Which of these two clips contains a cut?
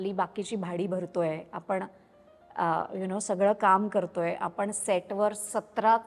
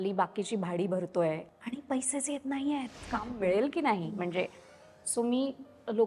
second; 2 cuts; at 1.5 s, 3.3 s

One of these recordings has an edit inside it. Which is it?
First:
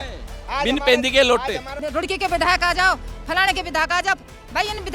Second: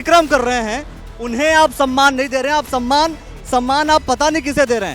first; 1 cut; at 1.8 s

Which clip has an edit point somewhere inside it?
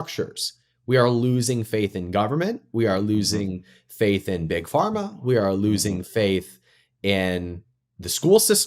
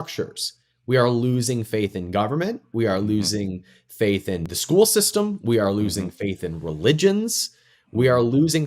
second; 1 cut; at 4.4 s

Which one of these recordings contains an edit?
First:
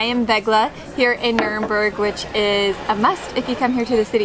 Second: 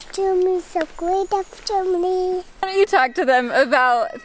second; 1 cut; at 2.7 s

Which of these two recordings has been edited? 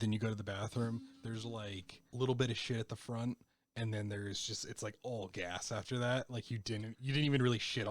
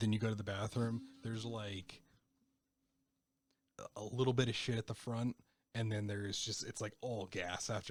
first; 1 cut; at 2.1 s

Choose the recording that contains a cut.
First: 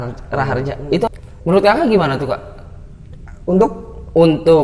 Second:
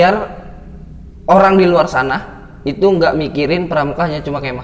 first; 1 cut; at 1.1 s

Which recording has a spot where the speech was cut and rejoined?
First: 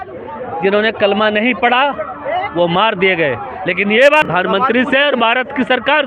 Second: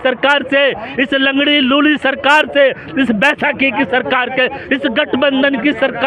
first; 1 cut; at 4.3 s

